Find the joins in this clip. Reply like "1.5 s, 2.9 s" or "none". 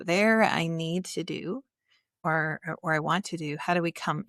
none